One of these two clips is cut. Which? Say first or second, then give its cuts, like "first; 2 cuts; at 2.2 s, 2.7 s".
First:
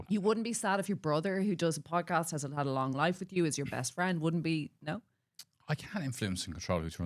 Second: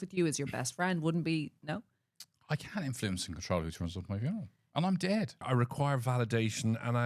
second; 1 cut; at 5.4 s